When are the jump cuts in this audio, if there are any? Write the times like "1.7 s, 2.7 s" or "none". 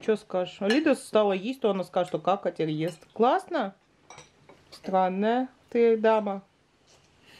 none